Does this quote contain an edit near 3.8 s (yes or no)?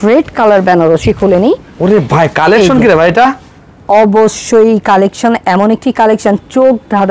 no